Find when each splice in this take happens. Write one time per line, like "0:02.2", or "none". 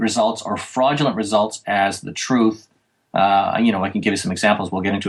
none